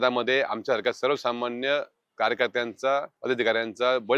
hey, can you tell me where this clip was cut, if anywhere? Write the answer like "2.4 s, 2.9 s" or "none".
3.1 s